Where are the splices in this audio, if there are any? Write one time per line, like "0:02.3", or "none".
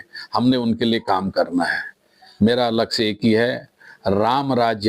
0:02.3